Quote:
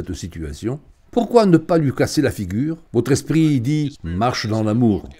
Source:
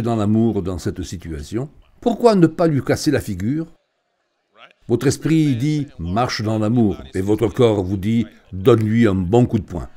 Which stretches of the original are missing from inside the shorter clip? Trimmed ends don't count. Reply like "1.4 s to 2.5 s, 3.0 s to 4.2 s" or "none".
3.7 s to 4.8 s